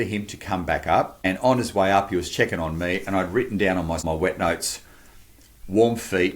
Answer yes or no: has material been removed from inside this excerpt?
yes